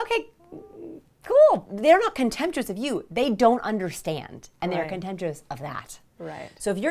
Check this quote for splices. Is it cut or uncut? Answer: cut